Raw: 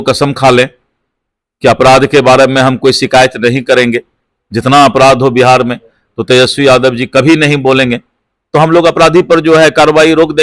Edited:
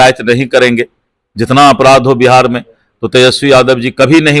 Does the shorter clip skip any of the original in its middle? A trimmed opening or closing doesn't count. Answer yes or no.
no